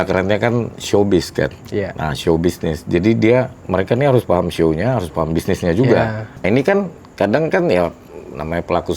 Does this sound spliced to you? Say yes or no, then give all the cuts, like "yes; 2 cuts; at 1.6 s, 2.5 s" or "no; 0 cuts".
yes; 1 cut; at 6.4 s